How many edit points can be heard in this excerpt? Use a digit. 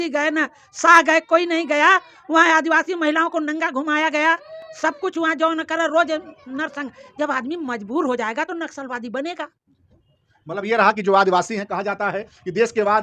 0